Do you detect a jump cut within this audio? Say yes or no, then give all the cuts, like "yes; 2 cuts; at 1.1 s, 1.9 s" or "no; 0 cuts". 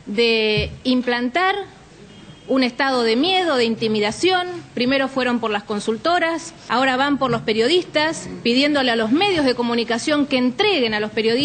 no; 0 cuts